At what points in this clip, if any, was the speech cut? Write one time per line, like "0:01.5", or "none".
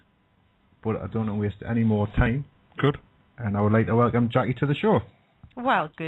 none